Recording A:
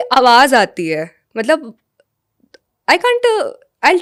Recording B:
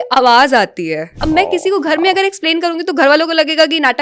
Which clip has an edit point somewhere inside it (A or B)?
B